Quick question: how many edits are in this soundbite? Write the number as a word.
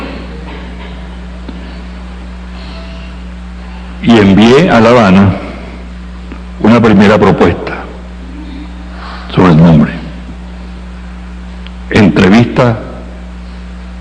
one